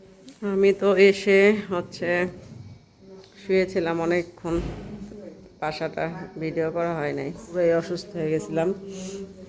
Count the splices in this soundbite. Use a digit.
1